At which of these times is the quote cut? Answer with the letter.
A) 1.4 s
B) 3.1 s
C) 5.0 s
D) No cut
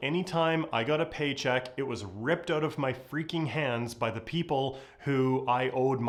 D